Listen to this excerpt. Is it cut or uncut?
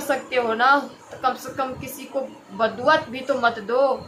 uncut